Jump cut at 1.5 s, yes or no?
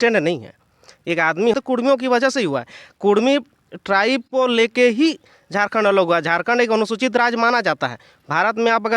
yes